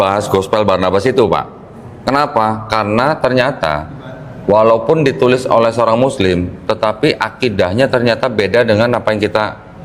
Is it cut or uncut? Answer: uncut